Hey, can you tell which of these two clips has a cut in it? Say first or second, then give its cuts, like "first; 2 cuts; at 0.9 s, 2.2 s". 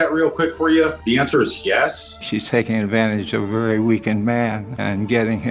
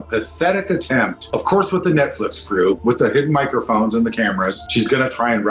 first; 2 cuts; at 1.0 s, 2.1 s